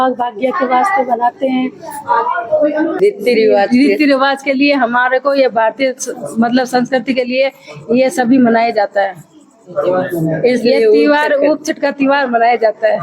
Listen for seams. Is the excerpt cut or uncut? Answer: cut